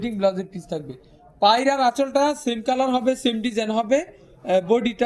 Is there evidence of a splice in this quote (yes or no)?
no